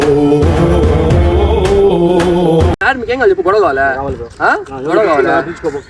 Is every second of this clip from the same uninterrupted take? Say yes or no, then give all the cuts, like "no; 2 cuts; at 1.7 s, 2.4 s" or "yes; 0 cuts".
no; 1 cut; at 2.8 s